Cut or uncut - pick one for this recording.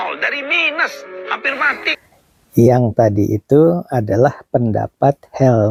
uncut